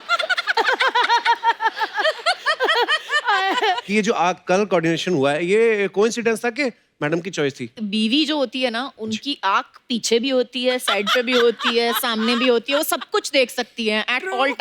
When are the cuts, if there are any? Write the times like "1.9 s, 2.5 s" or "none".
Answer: 3.8 s, 7.7 s